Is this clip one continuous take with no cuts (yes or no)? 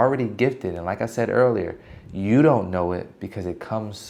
yes